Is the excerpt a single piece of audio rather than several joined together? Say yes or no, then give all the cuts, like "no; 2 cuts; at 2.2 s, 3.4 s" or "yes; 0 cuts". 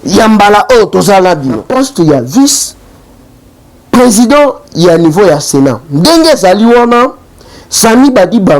no; 1 cut; at 1.6 s